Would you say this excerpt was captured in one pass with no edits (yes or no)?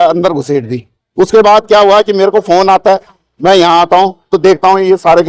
yes